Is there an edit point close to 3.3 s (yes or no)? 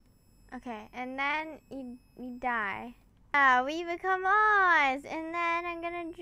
yes